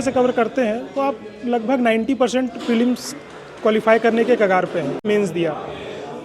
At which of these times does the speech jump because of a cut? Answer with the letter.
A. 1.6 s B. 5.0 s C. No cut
B